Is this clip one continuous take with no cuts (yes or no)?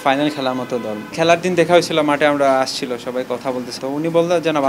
no